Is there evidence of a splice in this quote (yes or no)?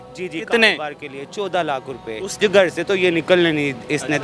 yes